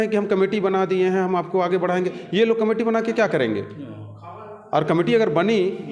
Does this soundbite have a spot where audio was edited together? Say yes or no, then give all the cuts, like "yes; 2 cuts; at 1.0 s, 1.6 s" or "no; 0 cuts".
no; 0 cuts